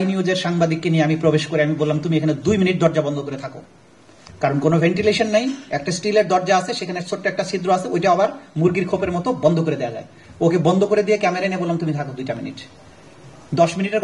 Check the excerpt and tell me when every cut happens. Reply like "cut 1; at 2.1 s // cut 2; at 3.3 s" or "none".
none